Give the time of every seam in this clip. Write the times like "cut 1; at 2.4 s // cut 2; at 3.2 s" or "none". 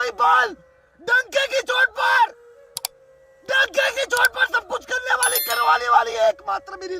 none